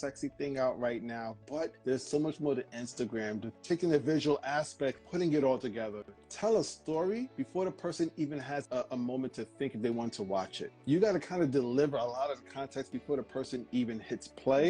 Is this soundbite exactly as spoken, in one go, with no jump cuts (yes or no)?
no